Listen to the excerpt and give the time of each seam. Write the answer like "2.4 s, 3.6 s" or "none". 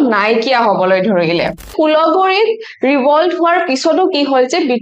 1.7 s